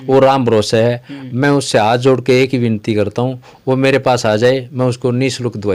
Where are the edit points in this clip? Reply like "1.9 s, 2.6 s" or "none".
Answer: none